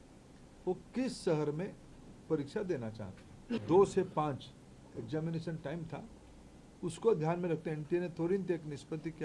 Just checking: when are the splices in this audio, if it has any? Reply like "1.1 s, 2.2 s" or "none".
3.6 s